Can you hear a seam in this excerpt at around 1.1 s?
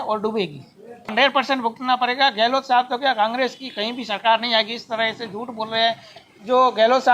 yes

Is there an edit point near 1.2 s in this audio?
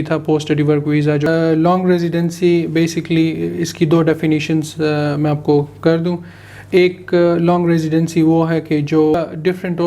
yes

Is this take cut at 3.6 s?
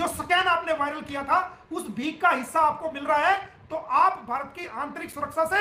no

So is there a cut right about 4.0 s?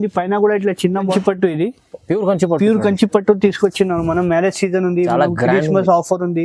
no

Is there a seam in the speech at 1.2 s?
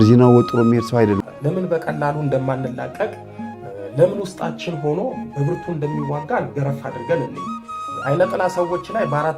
yes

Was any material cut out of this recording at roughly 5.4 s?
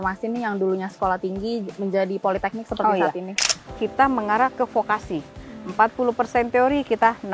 no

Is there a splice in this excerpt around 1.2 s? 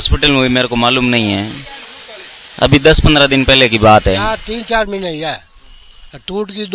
no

